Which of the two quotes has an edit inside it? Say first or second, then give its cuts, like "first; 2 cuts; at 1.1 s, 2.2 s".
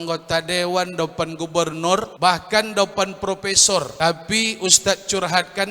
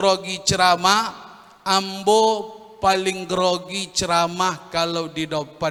first; 2 cuts; at 2.1 s, 3.9 s